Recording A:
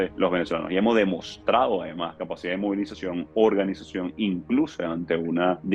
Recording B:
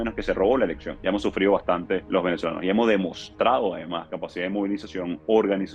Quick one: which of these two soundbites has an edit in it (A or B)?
B